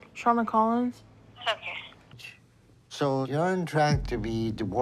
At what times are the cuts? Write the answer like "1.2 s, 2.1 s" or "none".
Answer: 2.2 s

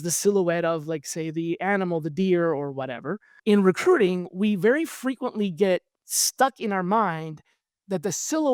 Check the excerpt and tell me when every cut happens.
3.3 s

